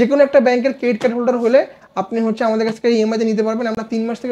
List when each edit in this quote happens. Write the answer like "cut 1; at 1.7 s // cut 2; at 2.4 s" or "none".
none